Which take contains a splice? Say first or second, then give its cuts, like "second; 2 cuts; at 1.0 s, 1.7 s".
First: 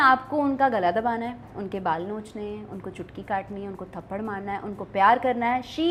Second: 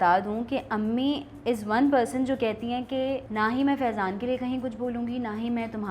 second; 1 cut; at 3.3 s